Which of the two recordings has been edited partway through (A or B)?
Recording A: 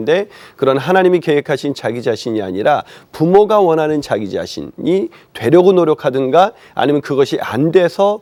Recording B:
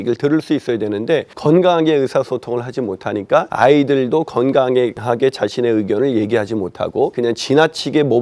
B